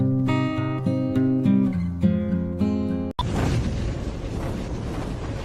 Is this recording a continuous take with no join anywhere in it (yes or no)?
yes